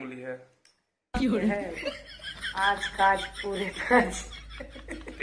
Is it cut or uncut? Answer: uncut